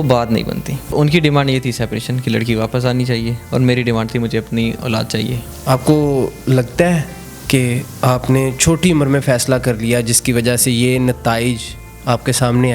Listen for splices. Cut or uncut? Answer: cut